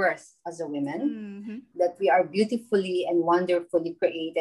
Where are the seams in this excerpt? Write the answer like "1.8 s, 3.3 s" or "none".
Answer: 1.6 s